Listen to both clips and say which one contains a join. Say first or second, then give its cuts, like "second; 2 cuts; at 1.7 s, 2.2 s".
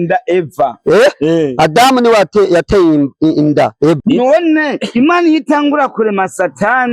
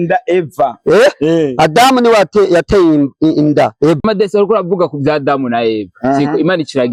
first; 1 cut; at 4.0 s